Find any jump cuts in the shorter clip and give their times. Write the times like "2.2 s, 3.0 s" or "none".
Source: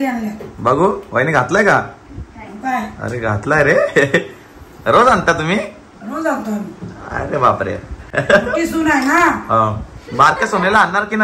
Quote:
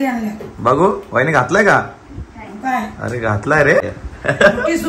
3.8 s